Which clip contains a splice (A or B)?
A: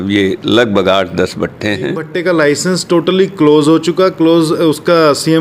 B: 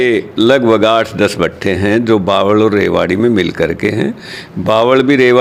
A